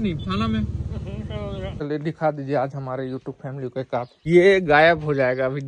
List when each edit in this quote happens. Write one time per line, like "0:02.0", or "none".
0:01.8
0:04.3